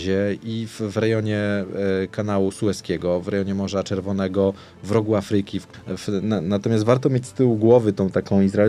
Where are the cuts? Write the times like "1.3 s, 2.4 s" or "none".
5.6 s